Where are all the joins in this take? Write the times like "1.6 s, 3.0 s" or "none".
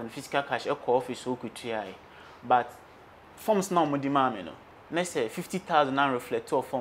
none